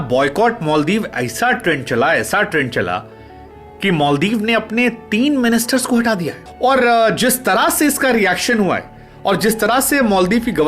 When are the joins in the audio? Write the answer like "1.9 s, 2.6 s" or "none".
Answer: 6.4 s